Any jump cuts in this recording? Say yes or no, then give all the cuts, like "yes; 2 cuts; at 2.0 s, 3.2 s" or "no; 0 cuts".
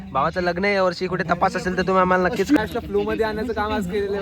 yes; 1 cut; at 2.6 s